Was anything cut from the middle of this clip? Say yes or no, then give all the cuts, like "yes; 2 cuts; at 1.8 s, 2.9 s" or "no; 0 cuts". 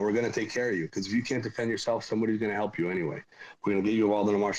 no; 0 cuts